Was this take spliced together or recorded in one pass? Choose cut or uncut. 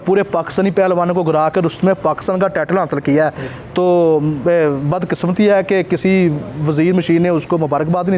uncut